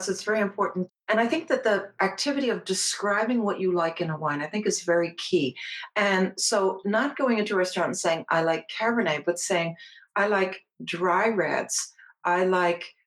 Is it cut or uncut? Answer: cut